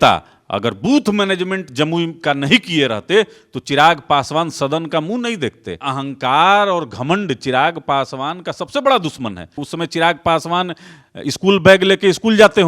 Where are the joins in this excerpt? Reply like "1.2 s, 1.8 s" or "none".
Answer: 5.9 s, 9.6 s